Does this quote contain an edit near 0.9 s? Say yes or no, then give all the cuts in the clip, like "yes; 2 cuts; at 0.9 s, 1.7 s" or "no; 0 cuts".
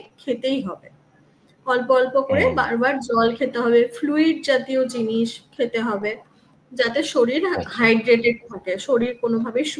no; 0 cuts